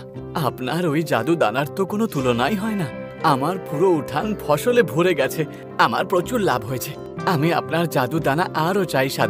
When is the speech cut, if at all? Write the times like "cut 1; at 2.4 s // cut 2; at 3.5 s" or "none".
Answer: none